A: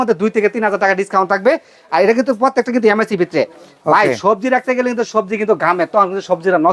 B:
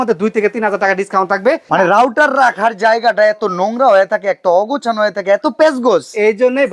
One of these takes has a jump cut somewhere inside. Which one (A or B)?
B